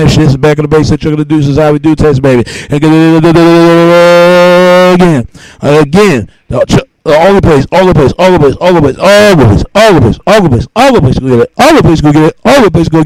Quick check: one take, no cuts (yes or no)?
yes